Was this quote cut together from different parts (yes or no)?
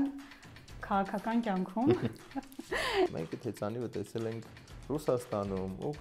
yes